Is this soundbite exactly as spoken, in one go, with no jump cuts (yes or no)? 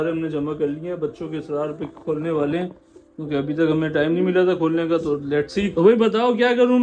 no